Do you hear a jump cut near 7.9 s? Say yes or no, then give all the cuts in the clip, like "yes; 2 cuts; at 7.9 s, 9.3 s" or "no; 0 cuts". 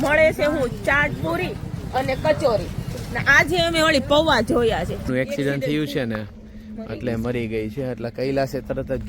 no; 1 cut; at 5.1 s